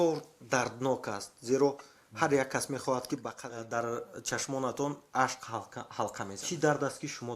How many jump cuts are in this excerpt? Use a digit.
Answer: 1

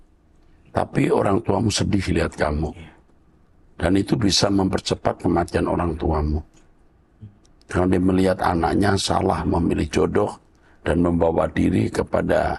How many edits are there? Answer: 0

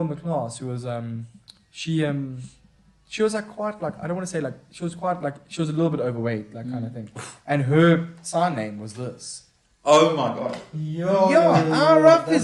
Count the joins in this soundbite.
0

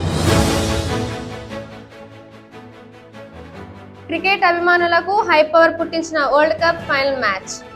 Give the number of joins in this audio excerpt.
2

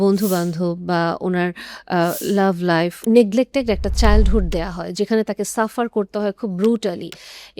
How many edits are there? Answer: 1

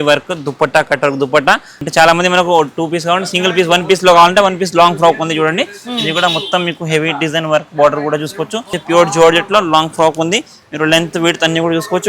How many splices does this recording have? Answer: 2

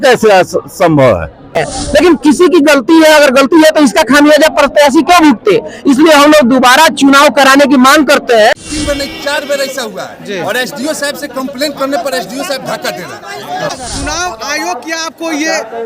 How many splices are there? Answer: 3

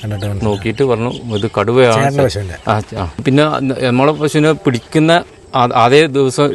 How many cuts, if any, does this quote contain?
1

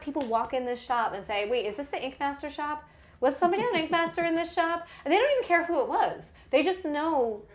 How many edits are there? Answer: 0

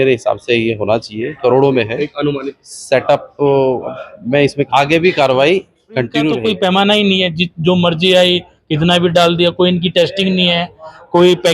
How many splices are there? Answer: 1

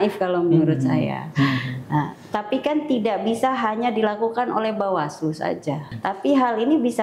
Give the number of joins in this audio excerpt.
1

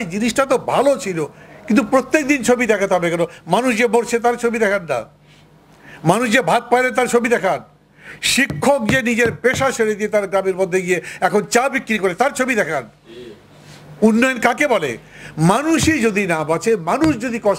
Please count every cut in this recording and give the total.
0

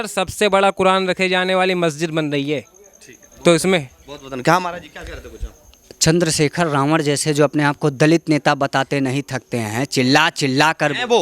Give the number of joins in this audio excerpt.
0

